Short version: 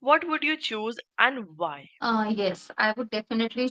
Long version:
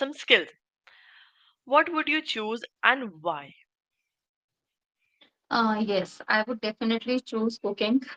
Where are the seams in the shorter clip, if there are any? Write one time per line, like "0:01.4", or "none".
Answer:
0:01.9